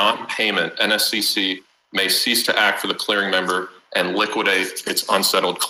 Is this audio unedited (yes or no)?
yes